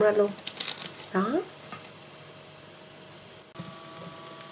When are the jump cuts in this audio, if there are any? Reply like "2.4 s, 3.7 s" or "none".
1.6 s, 3.4 s